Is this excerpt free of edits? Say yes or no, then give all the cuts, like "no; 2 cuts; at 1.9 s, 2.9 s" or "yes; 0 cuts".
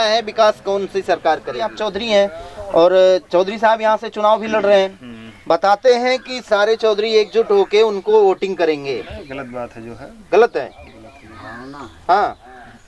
no; 1 cut; at 1.8 s